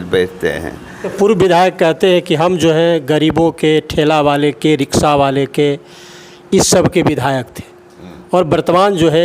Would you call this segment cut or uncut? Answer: cut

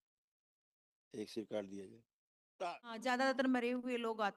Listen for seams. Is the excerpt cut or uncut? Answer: cut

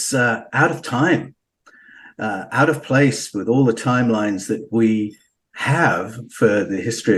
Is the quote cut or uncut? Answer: uncut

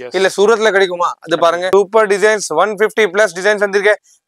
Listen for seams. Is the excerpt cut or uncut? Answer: cut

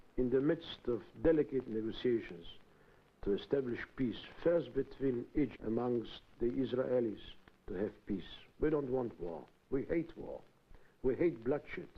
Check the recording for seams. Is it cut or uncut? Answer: uncut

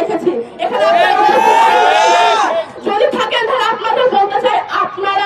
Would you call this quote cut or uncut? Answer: uncut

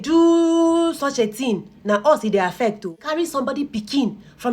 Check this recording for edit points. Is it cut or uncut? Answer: cut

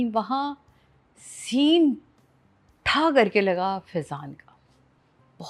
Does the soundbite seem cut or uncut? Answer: uncut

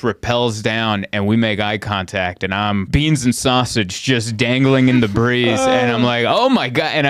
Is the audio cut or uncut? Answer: cut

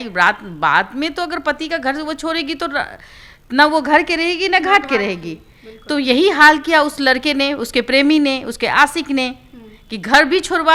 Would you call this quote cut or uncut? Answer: uncut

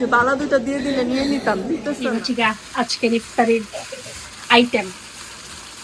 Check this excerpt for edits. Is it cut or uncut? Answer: cut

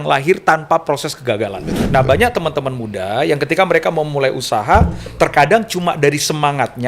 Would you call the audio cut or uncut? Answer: cut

